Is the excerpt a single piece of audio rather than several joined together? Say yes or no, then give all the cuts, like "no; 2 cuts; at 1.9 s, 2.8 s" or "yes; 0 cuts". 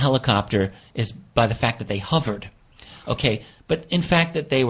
no; 1 cut; at 2.6 s